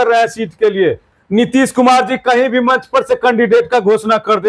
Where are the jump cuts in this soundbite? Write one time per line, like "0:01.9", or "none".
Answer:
0:01.1